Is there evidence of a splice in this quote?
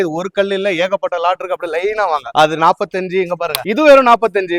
no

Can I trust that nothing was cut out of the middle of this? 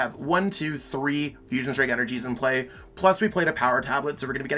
yes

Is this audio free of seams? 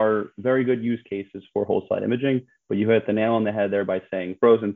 yes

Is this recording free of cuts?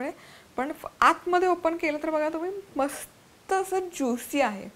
yes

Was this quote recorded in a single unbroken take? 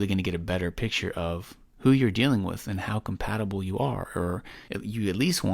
no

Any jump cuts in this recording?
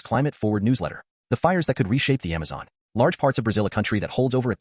no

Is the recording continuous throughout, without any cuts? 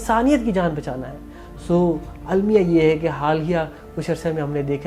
yes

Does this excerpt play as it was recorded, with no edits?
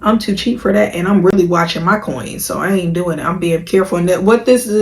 yes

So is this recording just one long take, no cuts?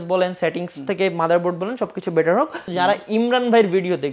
no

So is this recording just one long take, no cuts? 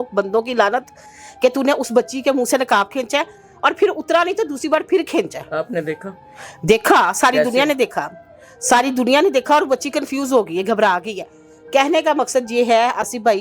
yes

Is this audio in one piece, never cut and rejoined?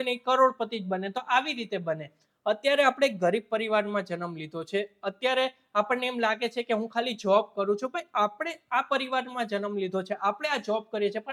yes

